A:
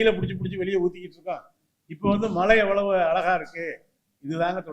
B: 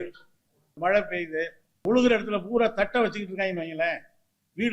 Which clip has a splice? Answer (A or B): B